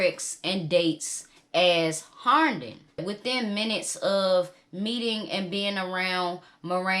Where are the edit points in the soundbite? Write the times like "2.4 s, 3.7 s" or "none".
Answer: 3.0 s

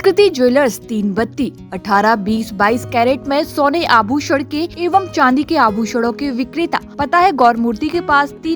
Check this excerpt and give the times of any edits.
4.7 s, 6.9 s

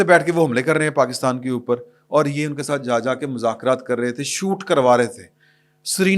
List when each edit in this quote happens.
none

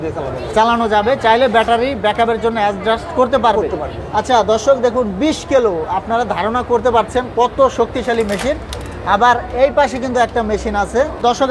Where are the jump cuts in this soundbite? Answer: none

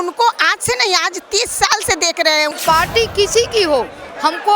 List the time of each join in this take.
2.5 s

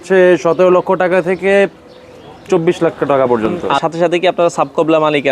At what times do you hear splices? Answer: 3.6 s

